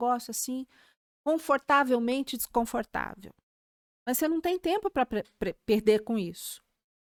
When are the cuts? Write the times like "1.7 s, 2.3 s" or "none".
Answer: none